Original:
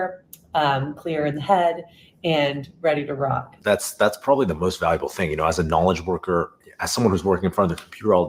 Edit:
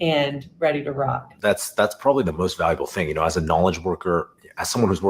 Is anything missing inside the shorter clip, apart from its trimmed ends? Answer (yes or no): no